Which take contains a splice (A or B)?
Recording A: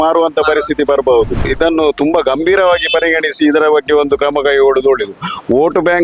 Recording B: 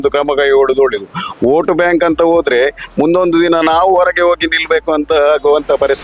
A